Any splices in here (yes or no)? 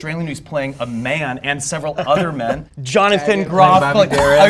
yes